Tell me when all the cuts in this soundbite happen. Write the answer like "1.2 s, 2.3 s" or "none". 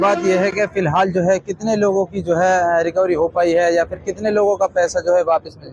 none